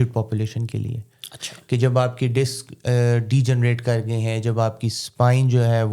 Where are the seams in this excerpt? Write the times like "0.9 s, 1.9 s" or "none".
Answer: none